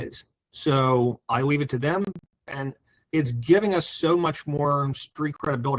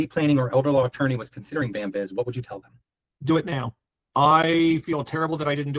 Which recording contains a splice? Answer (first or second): first